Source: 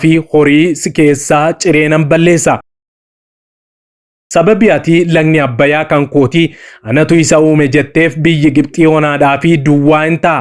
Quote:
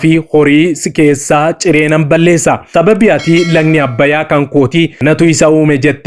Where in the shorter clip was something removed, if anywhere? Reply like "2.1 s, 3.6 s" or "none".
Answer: 2.6 s, 4.9 s

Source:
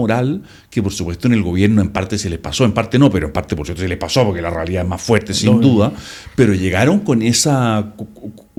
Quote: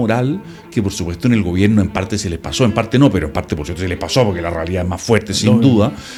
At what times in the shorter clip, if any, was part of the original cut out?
none

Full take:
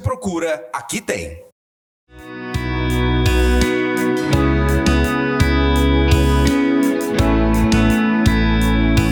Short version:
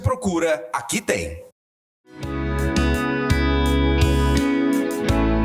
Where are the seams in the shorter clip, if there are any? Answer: 2.2 s

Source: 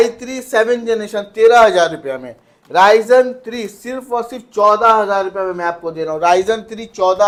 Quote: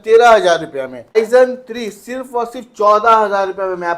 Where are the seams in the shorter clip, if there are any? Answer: 1.2 s

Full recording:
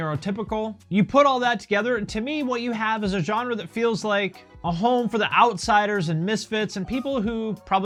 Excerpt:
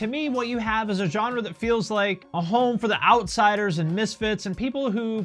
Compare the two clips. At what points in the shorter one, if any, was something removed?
2.2 s

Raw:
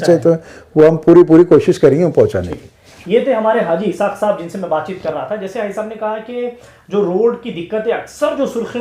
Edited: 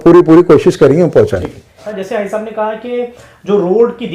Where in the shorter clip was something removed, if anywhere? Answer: 1.9 s

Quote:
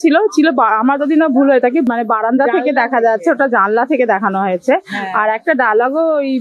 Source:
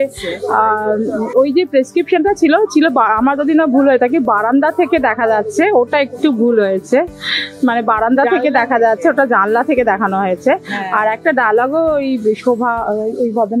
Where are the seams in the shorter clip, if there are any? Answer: 1.9 s

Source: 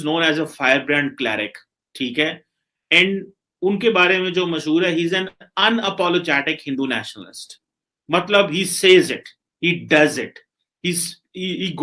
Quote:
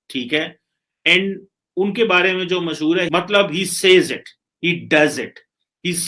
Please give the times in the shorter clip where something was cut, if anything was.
3.1 s

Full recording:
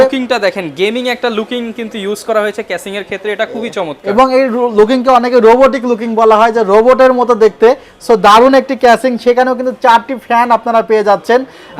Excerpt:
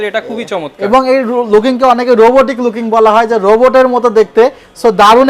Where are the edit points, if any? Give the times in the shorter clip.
none

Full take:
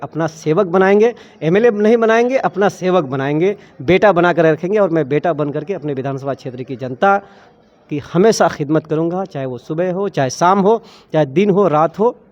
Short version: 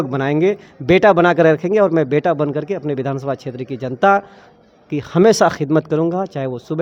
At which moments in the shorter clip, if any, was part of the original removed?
none

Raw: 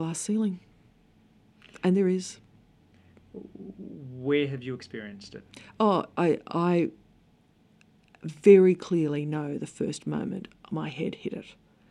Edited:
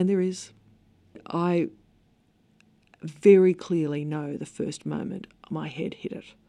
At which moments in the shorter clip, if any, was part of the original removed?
1.2 s

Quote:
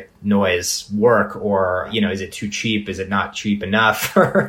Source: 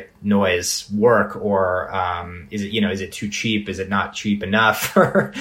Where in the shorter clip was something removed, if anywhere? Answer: 1.9 s

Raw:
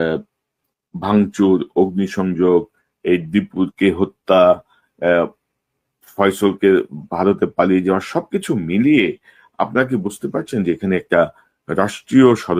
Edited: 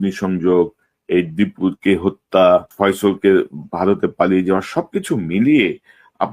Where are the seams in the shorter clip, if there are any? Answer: 2.7 s

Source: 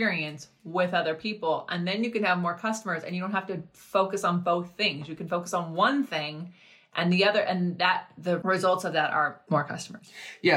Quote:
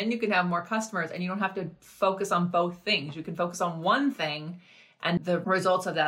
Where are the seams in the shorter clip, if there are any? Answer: 5.2 s

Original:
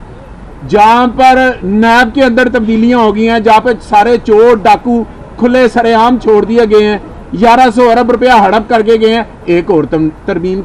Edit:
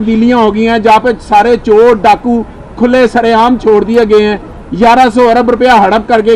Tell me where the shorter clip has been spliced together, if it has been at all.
none

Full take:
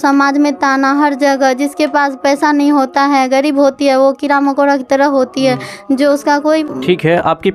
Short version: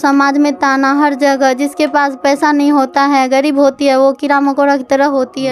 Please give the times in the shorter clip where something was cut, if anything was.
none

